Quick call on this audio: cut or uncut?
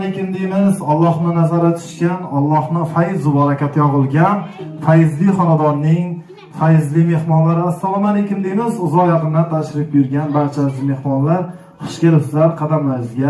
uncut